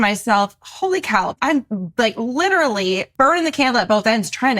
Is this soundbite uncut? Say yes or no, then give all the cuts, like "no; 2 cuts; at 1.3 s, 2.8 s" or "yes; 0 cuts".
no; 2 cuts; at 1.3 s, 3.1 s